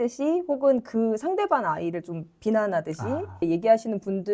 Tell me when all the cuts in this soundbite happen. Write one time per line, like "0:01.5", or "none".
0:03.4